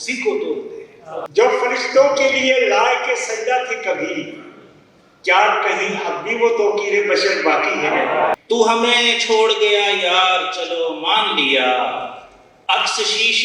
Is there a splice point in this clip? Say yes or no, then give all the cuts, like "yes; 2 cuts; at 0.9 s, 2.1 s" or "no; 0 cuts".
yes; 2 cuts; at 1.3 s, 8.4 s